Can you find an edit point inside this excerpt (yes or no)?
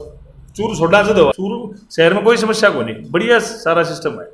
yes